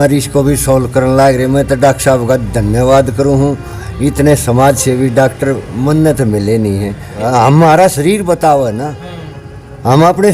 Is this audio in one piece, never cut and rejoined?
no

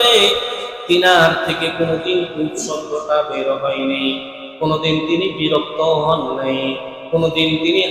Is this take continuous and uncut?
yes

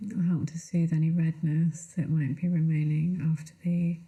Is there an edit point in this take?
no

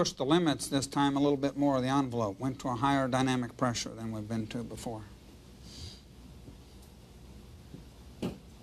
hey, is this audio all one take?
yes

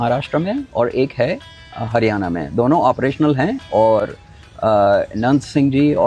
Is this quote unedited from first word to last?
yes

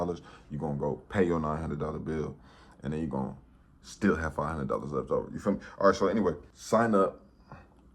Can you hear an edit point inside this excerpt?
no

